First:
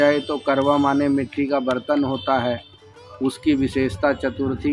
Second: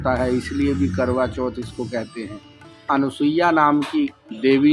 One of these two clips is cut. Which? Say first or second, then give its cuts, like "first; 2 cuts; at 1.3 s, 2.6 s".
second; 1 cut; at 2.8 s